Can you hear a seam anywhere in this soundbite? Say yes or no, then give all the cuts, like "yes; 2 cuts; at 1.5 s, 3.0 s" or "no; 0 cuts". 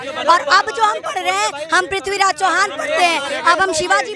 no; 0 cuts